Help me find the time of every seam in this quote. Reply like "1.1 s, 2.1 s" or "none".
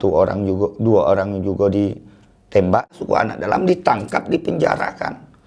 2.9 s